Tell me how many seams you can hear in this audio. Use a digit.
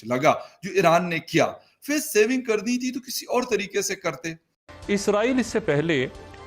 1